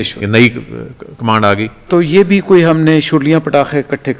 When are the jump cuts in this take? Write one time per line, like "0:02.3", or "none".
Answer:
none